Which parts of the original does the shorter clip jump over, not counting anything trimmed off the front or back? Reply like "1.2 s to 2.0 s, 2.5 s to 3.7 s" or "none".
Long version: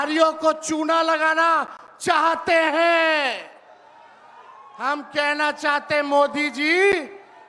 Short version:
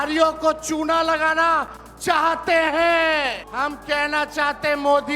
3.4 s to 4.7 s